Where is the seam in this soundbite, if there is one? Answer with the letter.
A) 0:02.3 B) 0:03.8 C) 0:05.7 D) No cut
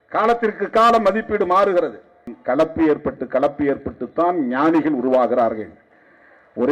A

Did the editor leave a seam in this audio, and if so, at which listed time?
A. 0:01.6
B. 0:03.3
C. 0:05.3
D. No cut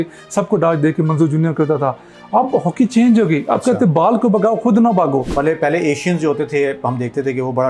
C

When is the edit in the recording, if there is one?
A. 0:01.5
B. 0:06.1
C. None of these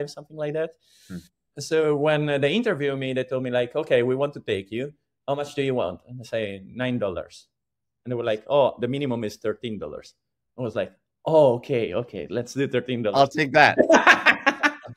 A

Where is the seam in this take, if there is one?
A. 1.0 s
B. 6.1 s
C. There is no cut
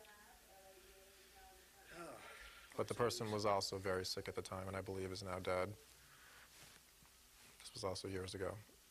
A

